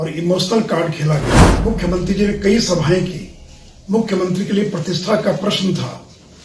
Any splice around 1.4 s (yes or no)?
yes